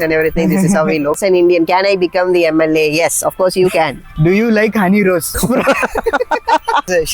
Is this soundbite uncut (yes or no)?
no